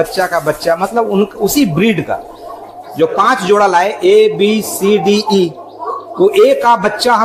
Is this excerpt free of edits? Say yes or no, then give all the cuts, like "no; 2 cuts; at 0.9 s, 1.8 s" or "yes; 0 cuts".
yes; 0 cuts